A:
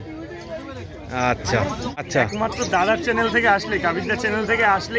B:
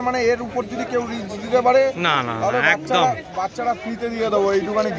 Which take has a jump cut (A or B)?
A